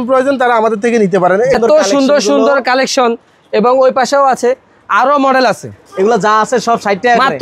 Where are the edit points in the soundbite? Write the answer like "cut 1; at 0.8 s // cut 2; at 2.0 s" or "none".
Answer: cut 1; at 1.5 s